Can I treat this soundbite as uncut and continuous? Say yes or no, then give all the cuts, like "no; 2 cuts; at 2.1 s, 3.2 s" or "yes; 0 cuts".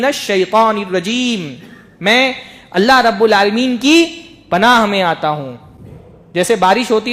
yes; 0 cuts